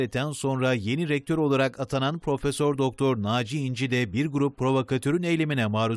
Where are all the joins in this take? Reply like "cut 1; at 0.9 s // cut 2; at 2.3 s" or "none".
none